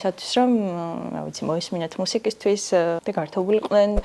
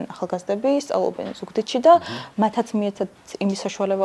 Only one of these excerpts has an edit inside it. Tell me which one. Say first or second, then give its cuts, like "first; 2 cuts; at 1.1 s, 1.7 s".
first; 1 cut; at 3.0 s